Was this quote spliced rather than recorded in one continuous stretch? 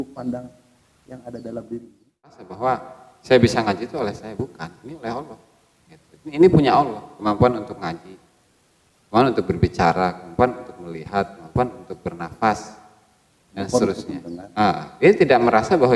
yes; 1 cut; at 2.5 s

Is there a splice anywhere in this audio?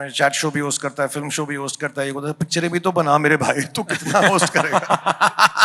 no; 0 cuts

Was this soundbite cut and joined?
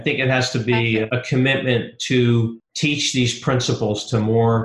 yes; 2 cuts; at 1.1 s, 2.6 s

